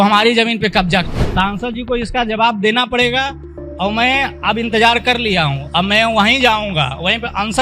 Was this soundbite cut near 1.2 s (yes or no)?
yes